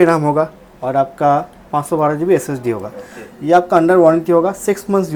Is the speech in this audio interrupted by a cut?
no; 0 cuts

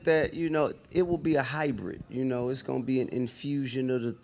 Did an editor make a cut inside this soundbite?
yes; 1 cut; at 3.3 s

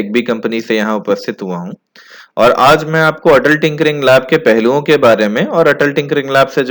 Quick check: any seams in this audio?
no; 0 cuts

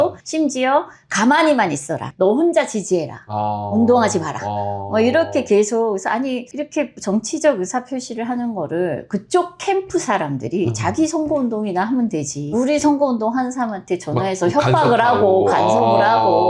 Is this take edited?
no; 0 cuts

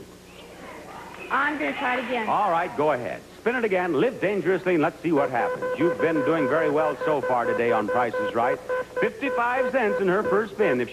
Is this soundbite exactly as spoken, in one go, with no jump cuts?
yes; 0 cuts

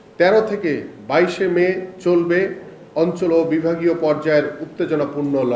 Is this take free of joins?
yes; 0 cuts

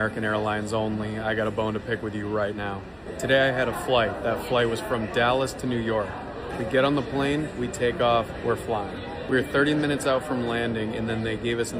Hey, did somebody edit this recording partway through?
no; 0 cuts

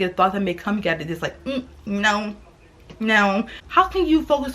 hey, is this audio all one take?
no; 1 cut; at 3.6 s

